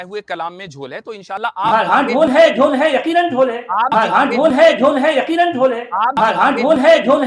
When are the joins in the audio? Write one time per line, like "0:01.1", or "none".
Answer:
0:01.5
0:03.9
0:06.1